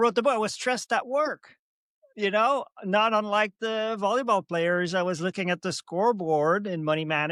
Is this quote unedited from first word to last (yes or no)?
yes